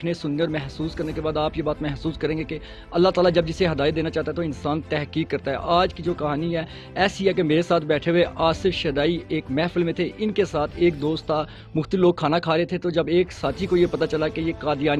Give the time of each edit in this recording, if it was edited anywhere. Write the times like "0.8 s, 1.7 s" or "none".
none